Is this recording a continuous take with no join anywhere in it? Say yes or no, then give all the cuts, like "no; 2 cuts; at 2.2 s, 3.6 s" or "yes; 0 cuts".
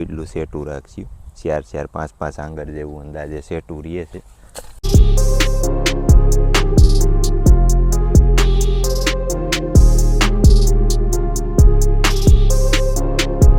yes; 0 cuts